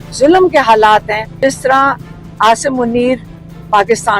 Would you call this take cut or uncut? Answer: cut